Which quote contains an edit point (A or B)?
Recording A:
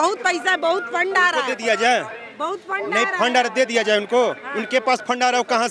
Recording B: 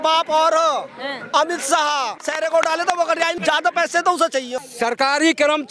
B